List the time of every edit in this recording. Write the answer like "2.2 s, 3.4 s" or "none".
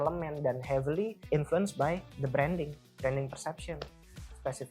1.2 s, 2.1 s

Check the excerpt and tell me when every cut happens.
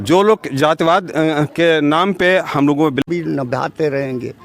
3.0 s

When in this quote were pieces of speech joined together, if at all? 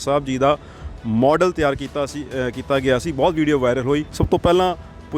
4.1 s

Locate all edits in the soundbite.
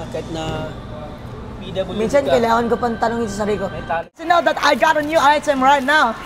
4.2 s

